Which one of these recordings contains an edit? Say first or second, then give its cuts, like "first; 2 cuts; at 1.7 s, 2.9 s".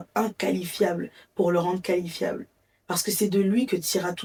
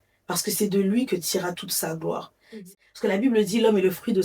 second; 1 cut; at 2.6 s